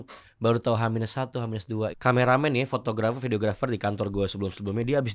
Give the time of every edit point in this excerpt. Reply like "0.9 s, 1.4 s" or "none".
1.9 s